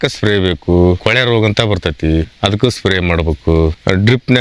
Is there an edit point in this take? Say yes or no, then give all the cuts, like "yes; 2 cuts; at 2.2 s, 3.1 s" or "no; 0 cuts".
yes; 1 cut; at 1.0 s